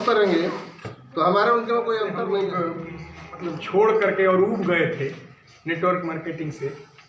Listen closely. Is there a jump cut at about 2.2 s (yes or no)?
yes